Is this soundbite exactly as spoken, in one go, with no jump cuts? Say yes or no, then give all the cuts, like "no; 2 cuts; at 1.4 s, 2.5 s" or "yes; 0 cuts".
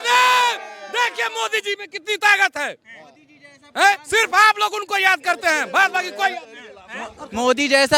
yes; 0 cuts